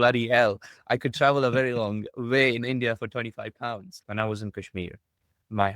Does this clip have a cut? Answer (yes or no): yes